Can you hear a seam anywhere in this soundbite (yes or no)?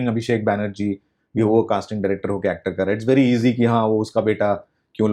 no